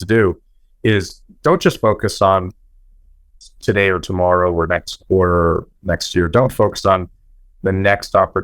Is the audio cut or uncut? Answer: uncut